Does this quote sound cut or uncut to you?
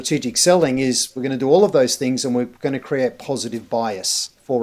uncut